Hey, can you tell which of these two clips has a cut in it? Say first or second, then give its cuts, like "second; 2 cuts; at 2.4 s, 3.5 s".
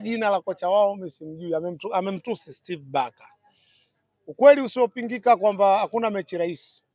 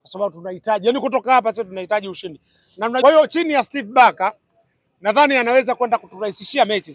second; 1 cut; at 3.0 s